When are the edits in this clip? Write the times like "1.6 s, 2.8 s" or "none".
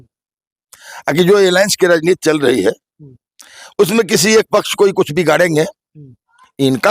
none